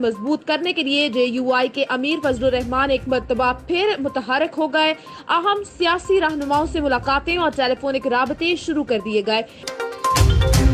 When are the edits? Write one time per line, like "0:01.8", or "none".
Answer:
0:09.6

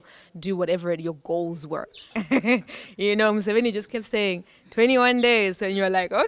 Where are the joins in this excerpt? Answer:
0:02.0

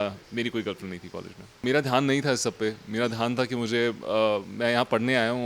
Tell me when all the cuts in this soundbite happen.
0:01.6

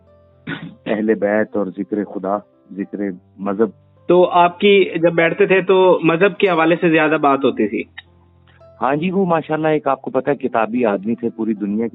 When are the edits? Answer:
none

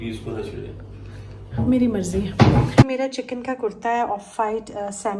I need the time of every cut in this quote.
0:02.8

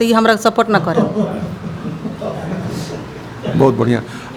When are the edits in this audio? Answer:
none

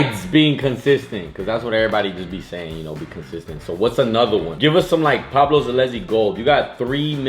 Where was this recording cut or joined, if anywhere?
none

